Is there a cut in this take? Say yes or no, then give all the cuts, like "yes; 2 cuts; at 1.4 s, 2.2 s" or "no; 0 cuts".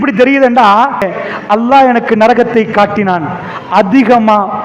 yes; 1 cut; at 1.1 s